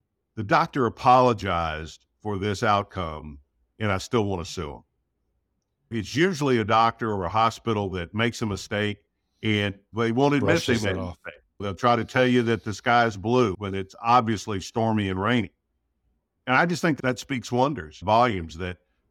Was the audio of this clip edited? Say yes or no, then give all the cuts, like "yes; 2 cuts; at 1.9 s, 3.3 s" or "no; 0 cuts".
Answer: no; 0 cuts